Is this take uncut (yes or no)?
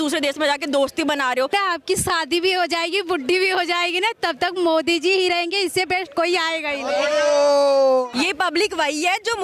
no